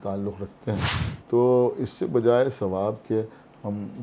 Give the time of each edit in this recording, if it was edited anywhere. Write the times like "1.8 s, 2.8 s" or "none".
1.0 s